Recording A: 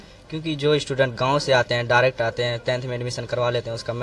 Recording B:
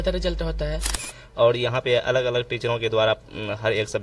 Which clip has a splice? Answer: B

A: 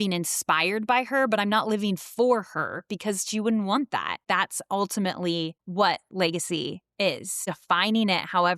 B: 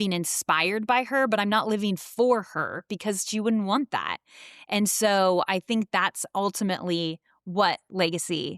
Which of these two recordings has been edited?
A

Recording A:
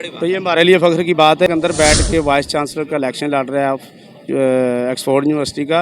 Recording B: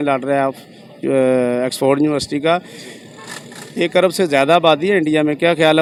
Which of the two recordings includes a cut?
A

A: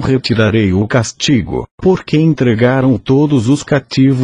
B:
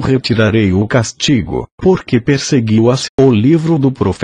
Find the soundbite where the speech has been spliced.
A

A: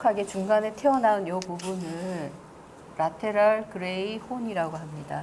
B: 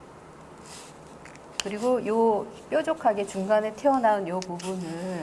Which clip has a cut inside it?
B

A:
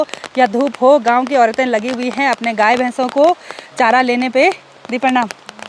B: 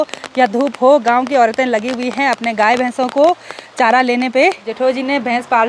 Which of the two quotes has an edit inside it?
B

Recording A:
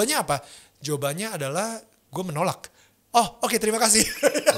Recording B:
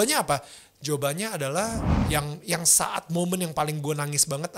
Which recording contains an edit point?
B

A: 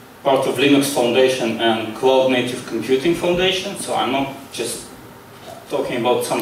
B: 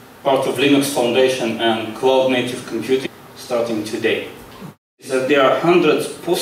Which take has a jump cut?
B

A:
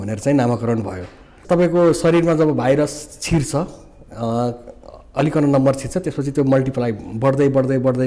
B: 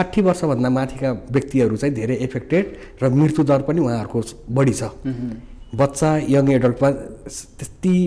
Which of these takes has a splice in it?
A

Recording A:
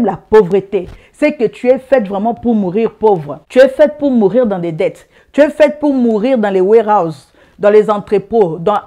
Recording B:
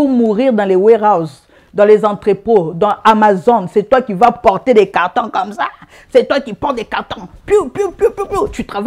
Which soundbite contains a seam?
A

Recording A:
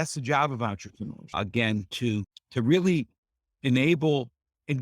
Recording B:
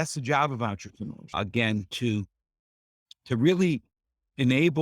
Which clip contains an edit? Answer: A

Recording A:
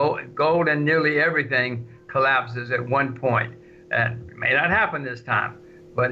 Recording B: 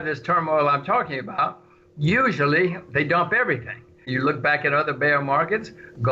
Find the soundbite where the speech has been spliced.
B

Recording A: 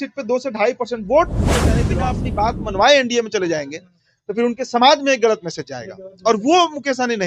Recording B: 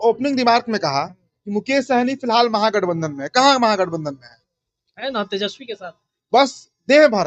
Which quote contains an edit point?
A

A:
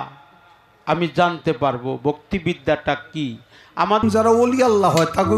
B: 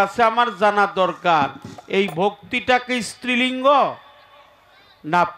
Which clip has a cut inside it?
A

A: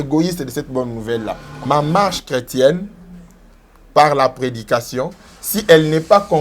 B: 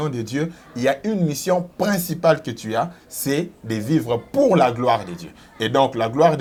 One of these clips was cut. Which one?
A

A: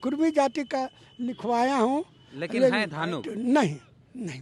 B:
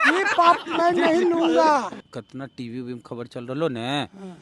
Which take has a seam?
B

